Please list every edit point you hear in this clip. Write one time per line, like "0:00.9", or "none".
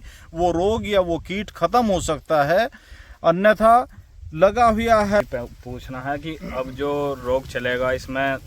0:05.2